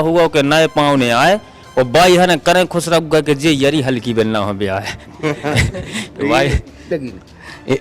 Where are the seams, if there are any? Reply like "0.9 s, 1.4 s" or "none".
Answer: 6.8 s